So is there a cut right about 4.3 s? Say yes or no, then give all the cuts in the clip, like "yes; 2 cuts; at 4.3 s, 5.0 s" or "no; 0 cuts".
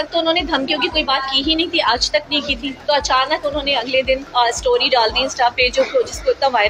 yes; 2 cuts; at 2.7 s, 4.3 s